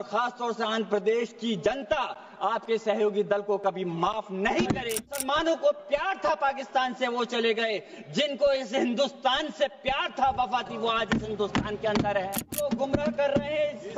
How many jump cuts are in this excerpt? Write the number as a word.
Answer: two